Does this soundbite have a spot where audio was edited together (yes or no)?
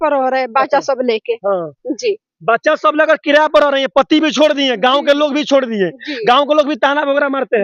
no